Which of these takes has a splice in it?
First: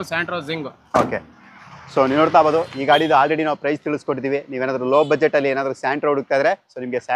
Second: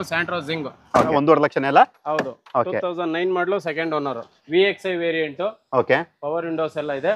second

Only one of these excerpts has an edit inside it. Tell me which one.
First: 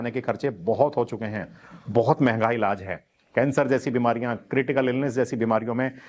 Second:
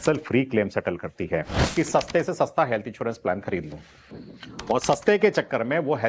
second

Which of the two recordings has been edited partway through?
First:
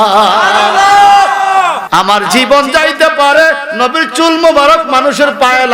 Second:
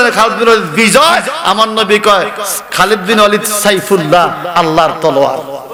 first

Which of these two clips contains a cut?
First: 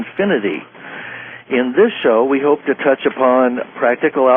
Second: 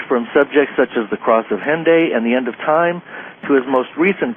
first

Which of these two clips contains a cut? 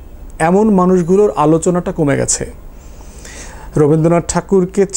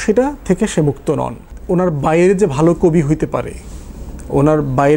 second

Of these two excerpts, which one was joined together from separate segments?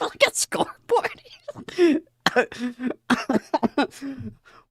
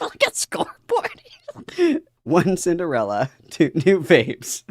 second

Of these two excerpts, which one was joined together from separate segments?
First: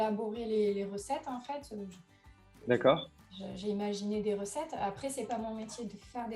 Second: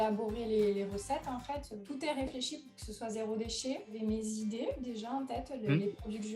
second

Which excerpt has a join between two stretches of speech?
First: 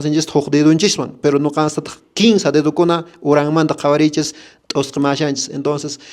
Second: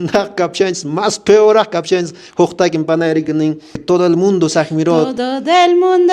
second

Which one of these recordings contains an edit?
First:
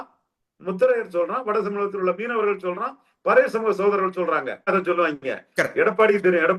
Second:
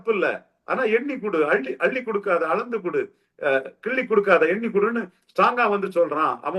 first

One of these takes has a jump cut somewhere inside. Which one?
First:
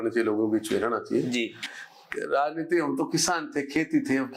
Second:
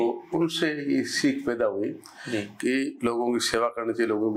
first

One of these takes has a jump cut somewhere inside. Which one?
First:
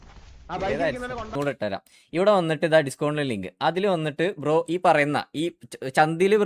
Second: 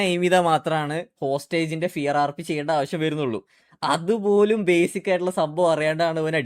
first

